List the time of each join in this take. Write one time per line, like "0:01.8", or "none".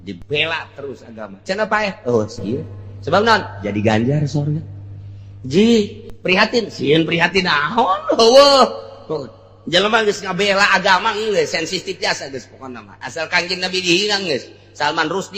none